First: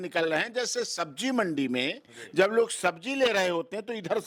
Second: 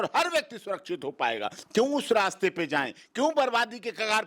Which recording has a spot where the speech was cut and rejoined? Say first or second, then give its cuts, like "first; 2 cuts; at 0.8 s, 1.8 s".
second; 1 cut; at 1.6 s